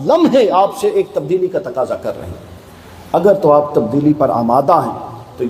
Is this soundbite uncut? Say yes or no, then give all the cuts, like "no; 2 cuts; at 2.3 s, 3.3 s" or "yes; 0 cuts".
yes; 0 cuts